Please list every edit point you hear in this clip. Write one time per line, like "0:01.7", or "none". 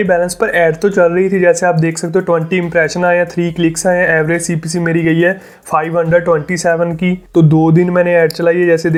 none